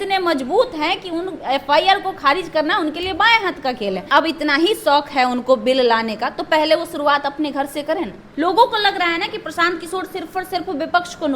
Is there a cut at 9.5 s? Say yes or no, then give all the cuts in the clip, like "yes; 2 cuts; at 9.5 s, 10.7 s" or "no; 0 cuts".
no; 2 cuts; at 4.1 s, 8.2 s